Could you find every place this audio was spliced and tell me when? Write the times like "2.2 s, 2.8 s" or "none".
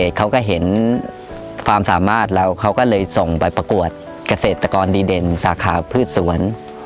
3.5 s, 5.9 s

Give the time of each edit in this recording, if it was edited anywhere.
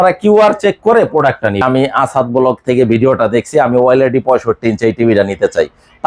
1.6 s

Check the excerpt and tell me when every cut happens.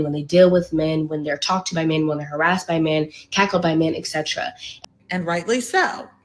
4.6 s

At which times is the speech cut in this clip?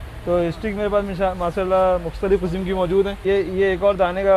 3.2 s

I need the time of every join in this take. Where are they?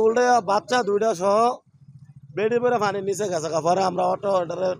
none

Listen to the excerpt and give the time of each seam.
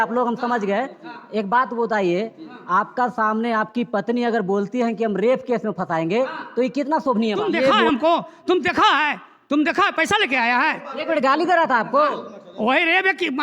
7.8 s

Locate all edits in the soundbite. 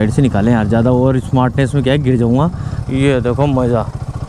2.7 s

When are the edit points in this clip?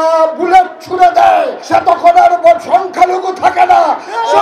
1.6 s

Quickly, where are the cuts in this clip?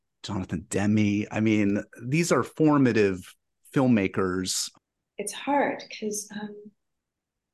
4.6 s

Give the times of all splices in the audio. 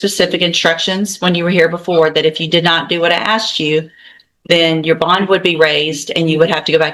none

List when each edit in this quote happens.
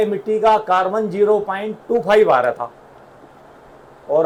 none

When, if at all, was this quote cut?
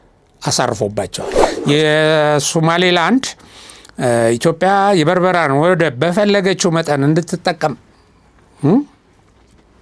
1.5 s

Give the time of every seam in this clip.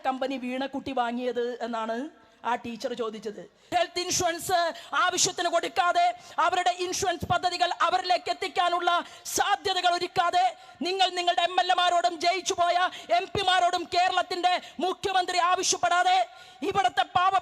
3.7 s

